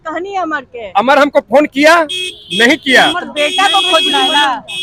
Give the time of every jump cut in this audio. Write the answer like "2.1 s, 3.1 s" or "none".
none